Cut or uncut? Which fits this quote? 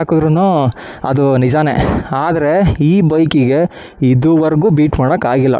uncut